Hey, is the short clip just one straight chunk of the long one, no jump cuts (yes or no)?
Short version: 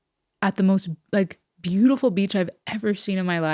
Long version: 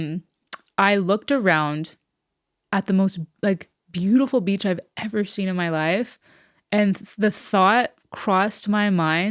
yes